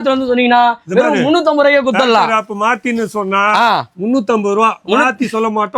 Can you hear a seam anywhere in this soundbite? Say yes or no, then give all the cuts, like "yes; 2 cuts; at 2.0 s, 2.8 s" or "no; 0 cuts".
no; 0 cuts